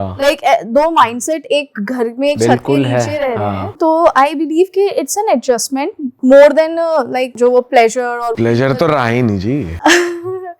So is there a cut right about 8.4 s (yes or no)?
yes